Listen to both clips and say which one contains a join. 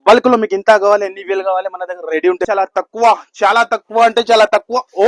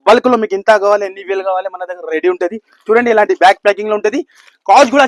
first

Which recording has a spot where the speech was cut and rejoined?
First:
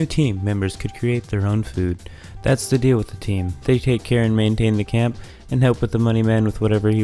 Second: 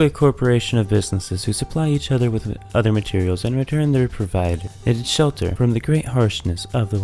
second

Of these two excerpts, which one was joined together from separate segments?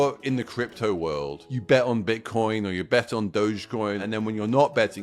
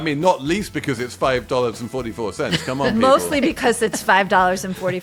first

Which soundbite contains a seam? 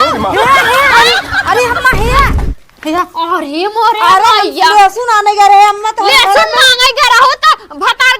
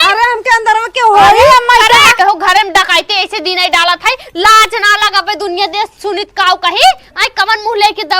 second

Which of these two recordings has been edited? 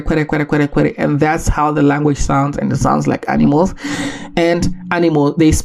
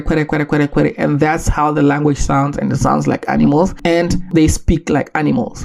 second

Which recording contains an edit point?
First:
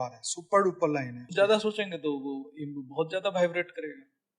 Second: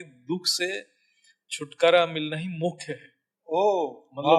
first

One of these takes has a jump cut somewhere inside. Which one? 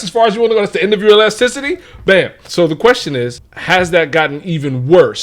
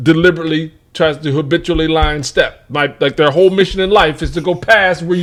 first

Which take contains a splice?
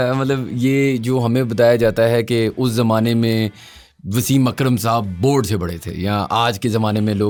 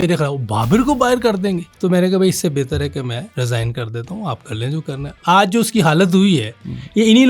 second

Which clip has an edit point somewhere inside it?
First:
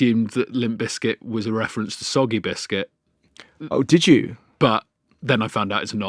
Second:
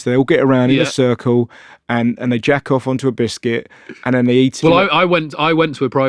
second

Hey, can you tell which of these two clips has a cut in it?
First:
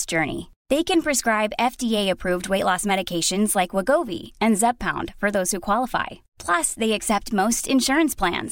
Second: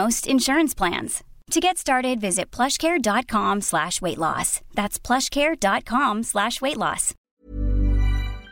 second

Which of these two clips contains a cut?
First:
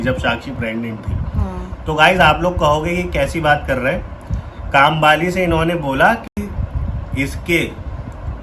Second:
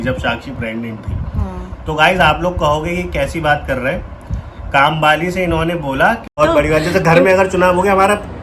second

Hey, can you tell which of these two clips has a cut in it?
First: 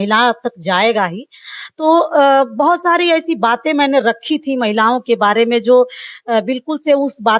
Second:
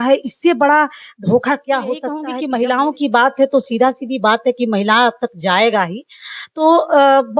second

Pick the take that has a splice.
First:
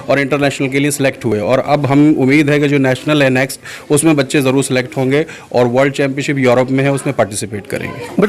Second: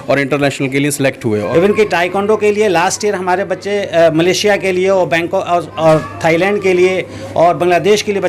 second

